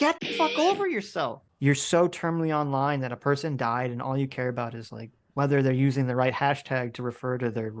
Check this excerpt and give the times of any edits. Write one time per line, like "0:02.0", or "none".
0:01.4